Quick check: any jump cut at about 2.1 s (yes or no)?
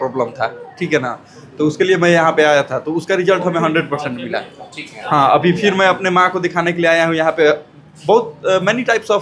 no